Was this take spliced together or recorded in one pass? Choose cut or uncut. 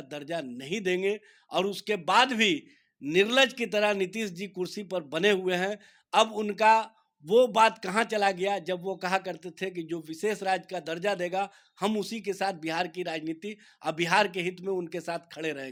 uncut